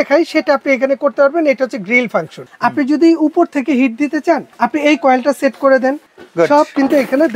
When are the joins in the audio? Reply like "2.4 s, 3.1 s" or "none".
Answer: 2.4 s, 4.5 s, 6.1 s